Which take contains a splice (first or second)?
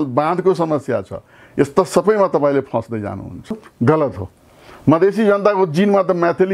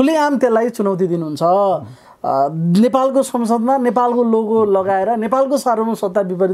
first